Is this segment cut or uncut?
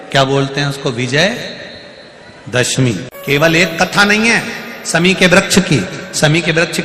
cut